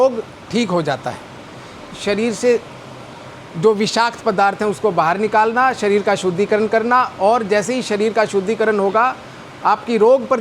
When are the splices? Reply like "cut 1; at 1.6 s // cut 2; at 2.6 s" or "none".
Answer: cut 1; at 1.8 s